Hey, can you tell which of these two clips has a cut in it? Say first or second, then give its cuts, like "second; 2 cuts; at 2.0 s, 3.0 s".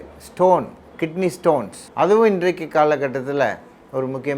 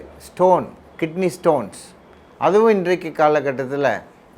first; 1 cut; at 1.8 s